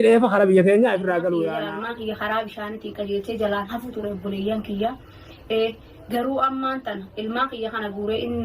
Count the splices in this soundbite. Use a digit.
1